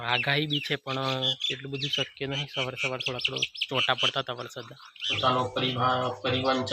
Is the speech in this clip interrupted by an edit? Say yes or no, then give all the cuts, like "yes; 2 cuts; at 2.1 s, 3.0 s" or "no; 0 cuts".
yes; 1 cut; at 5.1 s